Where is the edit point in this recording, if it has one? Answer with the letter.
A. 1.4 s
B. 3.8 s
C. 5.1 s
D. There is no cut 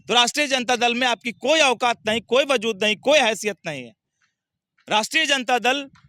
D